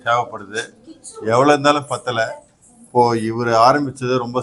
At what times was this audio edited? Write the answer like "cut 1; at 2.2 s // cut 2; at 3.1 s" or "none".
none